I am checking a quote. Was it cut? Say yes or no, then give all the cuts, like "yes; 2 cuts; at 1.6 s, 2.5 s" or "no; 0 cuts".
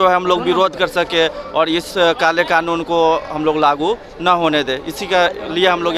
no; 0 cuts